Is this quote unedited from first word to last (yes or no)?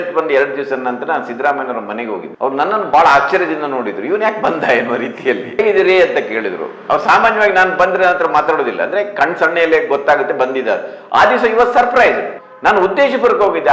yes